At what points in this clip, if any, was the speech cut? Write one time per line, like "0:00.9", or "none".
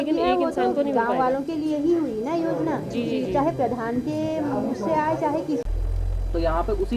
0:05.7